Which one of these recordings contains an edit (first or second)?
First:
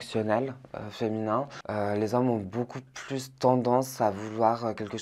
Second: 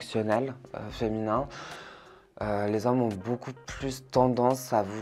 first